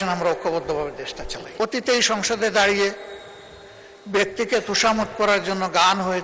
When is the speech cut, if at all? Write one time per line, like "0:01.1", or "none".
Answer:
0:01.5

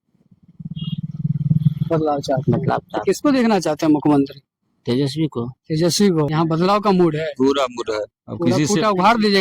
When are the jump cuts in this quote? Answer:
0:06.3

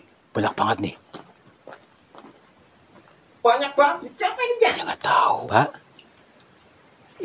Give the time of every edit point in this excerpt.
0:05.4

